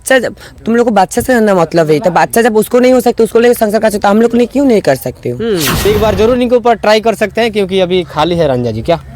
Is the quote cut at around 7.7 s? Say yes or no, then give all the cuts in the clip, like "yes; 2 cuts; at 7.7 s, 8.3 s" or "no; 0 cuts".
no; 1 cut; at 5.7 s